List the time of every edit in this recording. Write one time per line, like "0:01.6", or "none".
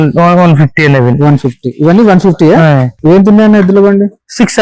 0:02.9